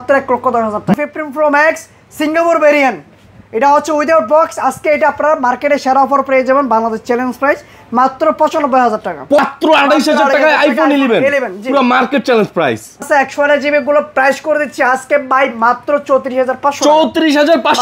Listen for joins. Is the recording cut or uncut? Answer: cut